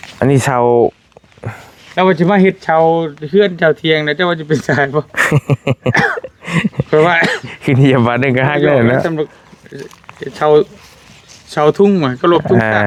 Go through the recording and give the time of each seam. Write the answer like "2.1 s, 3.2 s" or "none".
none